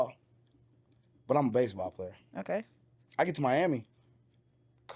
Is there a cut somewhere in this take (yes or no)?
no